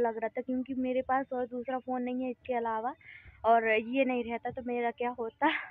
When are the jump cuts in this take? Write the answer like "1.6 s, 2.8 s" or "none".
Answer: none